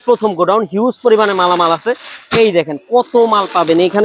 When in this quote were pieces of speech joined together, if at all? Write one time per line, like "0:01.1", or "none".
none